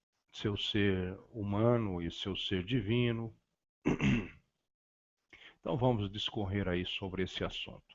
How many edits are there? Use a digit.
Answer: 1